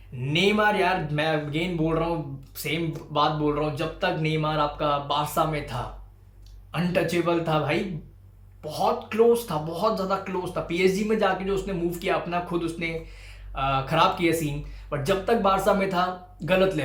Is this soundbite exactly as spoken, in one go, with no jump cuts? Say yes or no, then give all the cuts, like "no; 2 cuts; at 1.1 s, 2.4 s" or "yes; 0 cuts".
yes; 0 cuts